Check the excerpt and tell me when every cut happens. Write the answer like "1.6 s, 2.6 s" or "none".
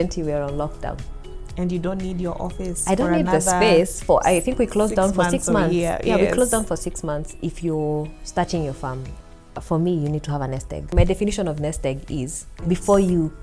7.3 s, 9.1 s, 10.9 s, 12.5 s